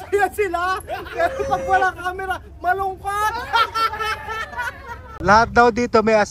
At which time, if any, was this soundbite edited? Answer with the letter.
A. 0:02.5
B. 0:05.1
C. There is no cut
B